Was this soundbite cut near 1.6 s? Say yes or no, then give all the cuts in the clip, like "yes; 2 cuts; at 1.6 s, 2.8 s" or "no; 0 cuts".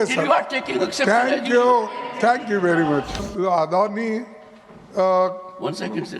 no; 1 cut; at 3.3 s